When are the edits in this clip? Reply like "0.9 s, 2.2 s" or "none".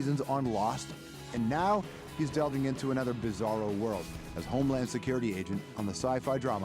2.3 s